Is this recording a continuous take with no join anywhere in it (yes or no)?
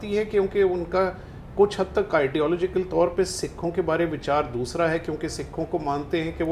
yes